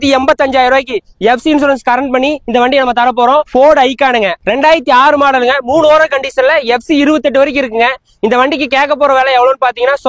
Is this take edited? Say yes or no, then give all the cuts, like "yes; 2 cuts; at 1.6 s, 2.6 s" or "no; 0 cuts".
no; 0 cuts